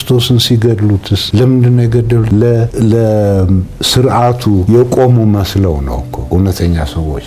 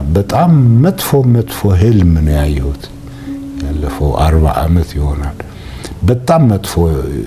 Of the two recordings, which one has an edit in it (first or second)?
first